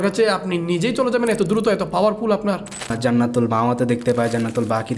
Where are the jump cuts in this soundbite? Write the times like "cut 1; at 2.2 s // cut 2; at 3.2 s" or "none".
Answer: cut 1; at 2.9 s